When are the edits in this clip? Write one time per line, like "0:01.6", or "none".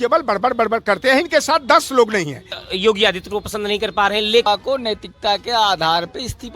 0:02.6
0:04.5

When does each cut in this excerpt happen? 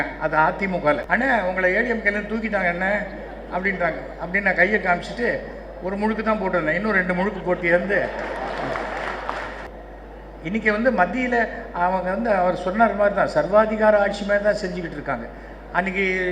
0:01.0
0:09.6

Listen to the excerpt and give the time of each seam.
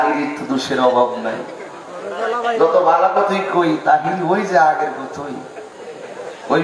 none

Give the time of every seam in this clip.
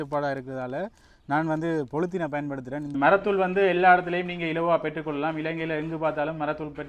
0:02.8

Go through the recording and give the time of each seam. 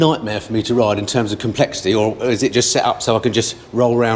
none

